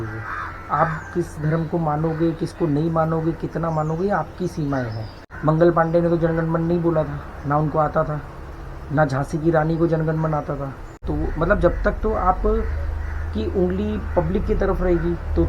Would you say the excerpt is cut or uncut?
cut